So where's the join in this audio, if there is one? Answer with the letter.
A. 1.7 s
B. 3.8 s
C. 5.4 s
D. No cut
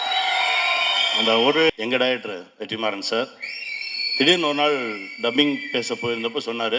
A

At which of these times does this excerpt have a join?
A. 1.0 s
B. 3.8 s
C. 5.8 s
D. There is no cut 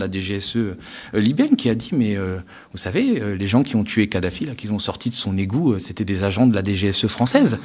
D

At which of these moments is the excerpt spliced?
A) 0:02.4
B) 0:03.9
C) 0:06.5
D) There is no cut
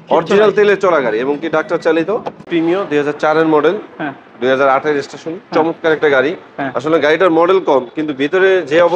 A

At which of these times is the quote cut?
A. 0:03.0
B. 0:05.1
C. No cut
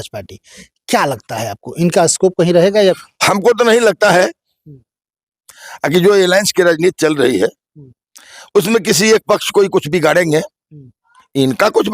A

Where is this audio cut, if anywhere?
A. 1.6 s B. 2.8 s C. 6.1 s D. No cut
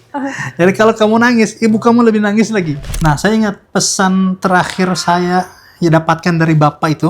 B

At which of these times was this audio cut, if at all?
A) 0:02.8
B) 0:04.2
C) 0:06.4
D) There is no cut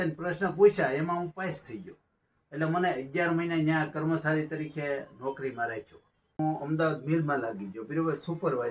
C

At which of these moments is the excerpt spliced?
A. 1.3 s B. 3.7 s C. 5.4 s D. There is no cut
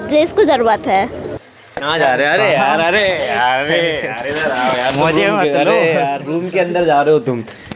A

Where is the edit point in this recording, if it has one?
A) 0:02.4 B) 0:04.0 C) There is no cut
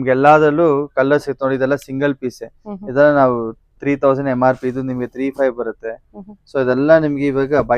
C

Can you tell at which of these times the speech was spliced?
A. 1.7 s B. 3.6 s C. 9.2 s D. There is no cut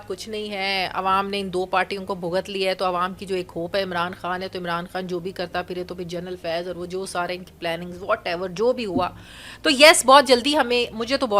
D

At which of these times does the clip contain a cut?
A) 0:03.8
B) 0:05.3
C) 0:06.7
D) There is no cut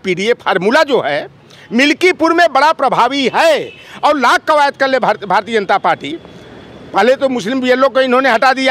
D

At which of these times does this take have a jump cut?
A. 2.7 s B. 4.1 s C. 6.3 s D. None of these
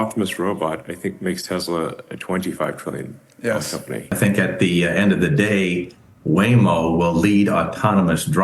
B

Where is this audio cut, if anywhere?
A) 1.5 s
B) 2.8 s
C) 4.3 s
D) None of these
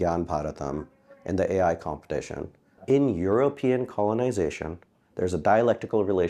B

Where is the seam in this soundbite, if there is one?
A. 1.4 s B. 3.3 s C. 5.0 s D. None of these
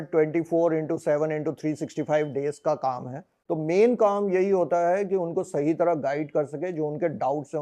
B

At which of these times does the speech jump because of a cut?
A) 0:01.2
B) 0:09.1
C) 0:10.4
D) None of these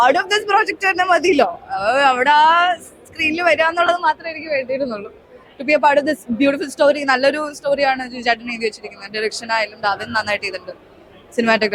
D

